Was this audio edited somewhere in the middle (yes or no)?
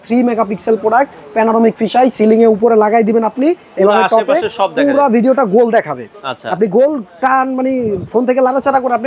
no